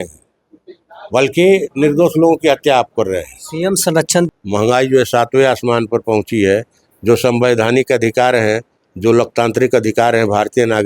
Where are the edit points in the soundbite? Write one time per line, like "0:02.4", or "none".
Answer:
0:04.3